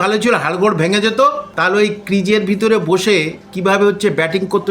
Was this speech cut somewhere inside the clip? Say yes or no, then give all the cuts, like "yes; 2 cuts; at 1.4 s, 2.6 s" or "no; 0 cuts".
yes; 1 cut; at 1.5 s